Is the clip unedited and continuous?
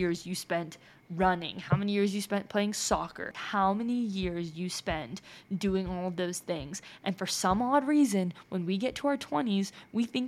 no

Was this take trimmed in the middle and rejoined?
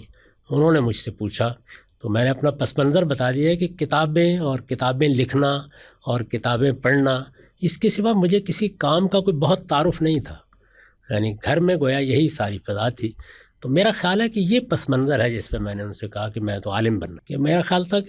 yes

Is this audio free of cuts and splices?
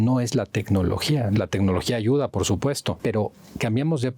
no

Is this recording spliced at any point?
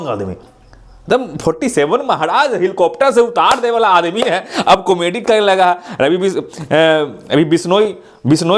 no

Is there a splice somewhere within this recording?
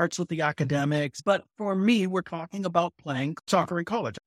yes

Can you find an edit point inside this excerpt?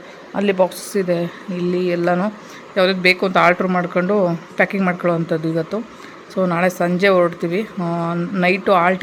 no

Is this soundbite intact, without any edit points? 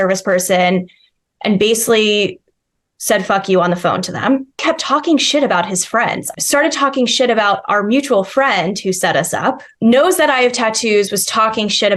no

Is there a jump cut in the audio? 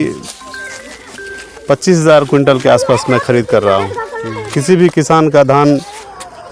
no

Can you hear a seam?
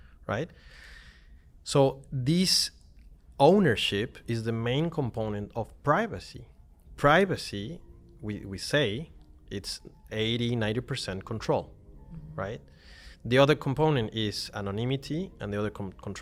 no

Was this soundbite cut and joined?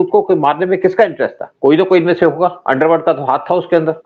no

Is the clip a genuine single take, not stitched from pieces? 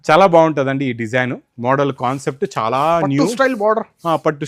yes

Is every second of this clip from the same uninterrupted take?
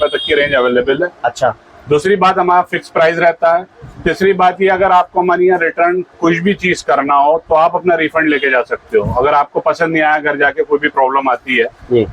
yes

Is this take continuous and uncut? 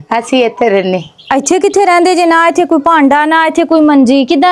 yes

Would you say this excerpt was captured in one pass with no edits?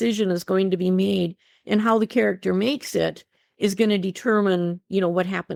yes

